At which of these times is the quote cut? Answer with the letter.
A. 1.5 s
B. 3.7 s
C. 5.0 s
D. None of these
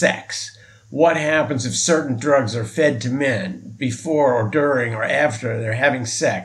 D